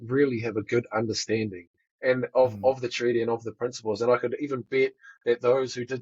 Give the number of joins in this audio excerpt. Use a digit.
0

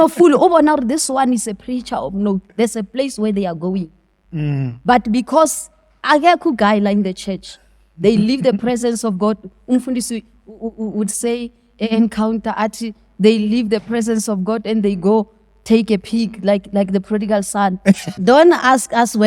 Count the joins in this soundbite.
1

